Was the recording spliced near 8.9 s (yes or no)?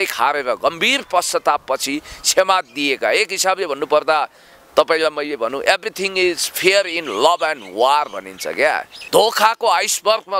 yes